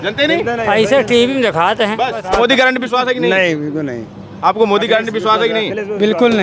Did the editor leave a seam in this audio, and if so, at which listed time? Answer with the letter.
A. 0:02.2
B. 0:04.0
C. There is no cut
A